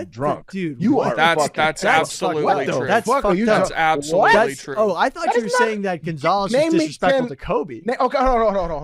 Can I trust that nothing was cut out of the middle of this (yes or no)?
yes